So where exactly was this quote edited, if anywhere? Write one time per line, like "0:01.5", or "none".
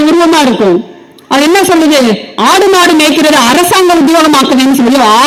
none

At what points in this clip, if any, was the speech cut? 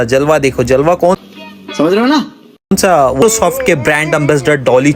0:03.2

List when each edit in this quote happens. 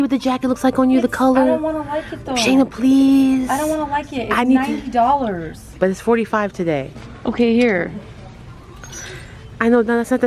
0:06.9

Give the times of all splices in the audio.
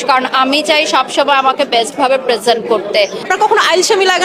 0:03.3

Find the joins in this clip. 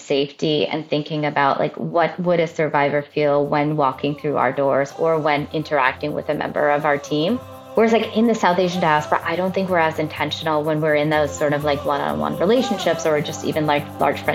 none

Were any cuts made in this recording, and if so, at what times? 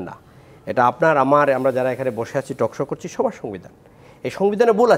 none

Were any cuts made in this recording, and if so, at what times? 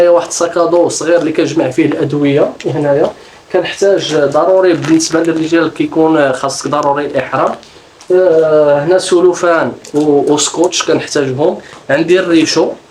none

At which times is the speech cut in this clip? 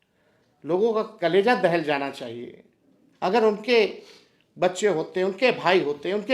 none

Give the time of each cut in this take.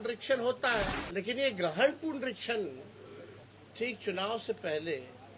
0:01.0

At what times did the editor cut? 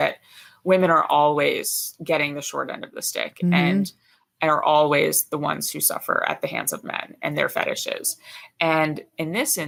none

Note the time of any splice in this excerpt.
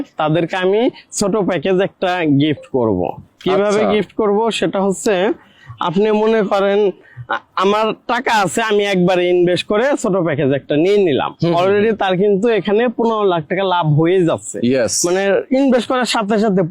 none

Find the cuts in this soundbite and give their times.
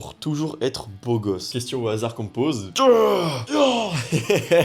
0:02.7

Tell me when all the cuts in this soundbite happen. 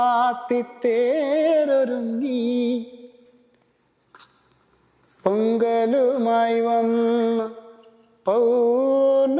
none

